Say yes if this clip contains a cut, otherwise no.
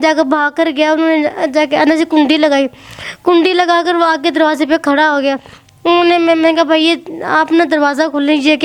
no